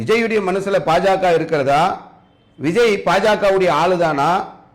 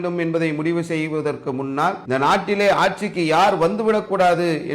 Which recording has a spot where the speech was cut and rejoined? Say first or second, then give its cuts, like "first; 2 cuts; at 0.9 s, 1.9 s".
second; 1 cut; at 2.0 s